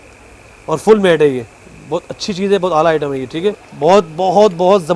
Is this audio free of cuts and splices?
no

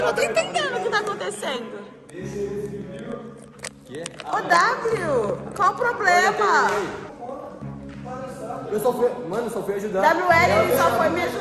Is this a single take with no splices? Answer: yes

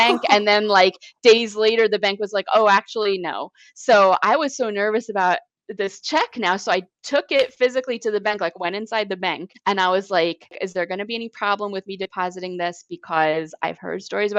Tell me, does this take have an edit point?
yes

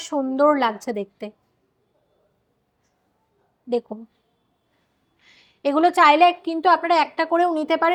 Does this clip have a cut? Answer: no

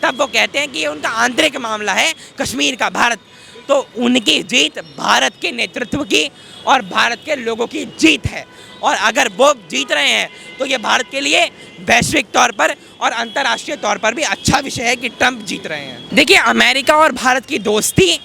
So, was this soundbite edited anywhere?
yes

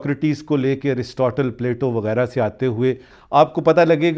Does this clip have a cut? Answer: yes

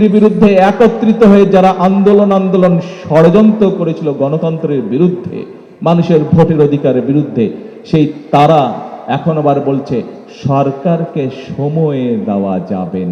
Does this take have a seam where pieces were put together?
no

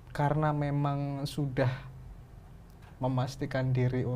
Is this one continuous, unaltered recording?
yes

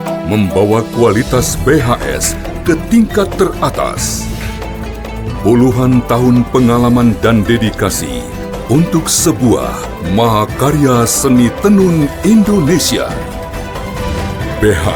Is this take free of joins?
yes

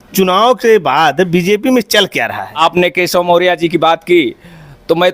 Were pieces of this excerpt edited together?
yes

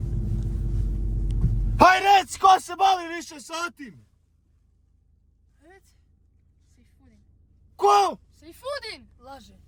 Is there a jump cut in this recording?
no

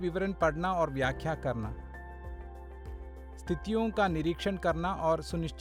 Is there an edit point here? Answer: no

